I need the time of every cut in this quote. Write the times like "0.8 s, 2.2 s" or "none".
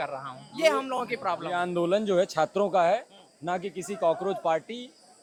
none